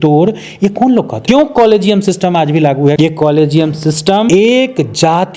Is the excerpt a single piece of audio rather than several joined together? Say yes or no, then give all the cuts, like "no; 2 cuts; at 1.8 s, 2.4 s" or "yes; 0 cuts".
no; 3 cuts; at 1.1 s, 3.0 s, 4.3 s